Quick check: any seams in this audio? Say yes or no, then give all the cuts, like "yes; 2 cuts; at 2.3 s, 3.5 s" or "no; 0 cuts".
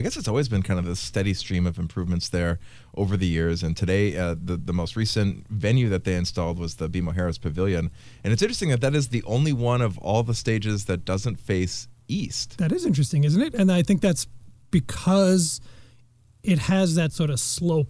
no; 0 cuts